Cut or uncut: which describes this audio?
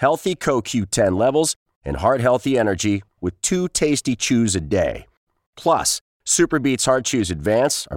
uncut